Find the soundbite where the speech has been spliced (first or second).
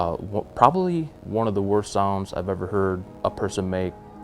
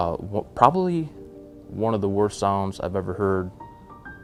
first